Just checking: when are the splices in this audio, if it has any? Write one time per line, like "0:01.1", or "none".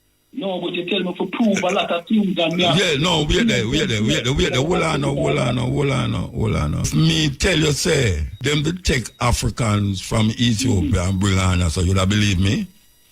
0:06.9
0:08.3